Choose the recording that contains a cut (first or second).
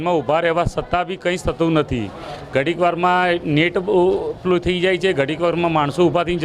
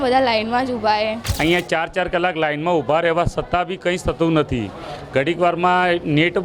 second